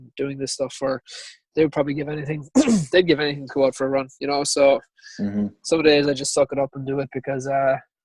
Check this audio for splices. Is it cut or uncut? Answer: uncut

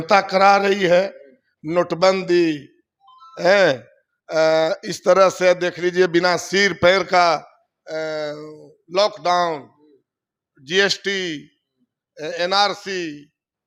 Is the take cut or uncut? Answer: uncut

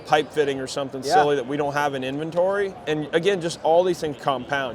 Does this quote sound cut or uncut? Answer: cut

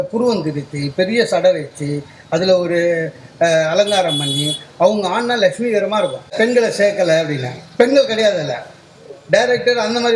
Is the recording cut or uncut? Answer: cut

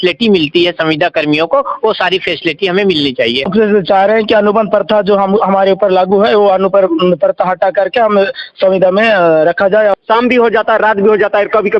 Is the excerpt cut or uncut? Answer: cut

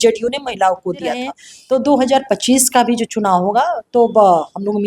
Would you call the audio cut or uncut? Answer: cut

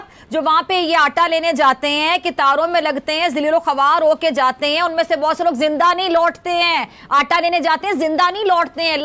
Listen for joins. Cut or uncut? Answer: uncut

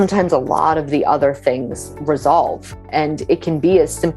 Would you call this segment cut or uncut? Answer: cut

